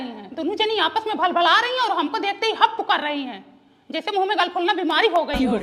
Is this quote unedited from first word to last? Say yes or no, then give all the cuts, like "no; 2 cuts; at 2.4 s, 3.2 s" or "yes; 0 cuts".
yes; 0 cuts